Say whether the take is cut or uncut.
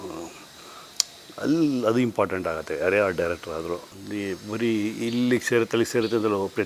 cut